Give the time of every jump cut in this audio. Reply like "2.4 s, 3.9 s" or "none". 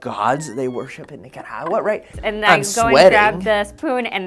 2.1 s